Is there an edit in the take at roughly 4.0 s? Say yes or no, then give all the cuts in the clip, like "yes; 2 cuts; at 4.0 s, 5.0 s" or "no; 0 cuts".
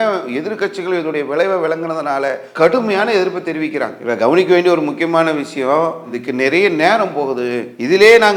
no; 0 cuts